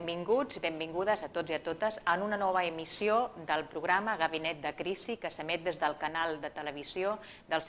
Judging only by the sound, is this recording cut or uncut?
cut